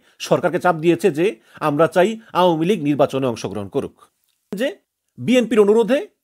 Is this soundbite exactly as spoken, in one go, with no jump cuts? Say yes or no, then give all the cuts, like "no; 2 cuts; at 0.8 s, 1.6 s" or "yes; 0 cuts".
no; 1 cut; at 4.6 s